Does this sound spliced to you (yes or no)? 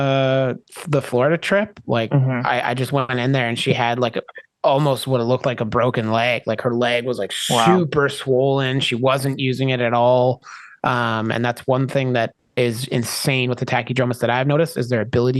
yes